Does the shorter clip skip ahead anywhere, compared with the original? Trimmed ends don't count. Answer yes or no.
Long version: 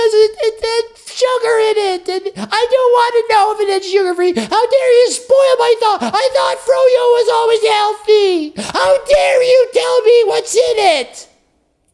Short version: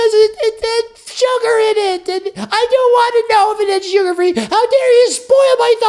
no